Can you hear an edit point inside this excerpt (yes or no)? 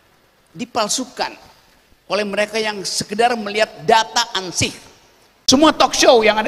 yes